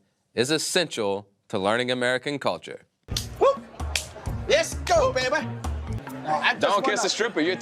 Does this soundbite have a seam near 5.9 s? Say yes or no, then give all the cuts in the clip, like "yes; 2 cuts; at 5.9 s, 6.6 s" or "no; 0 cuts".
yes; 1 cut; at 5.9 s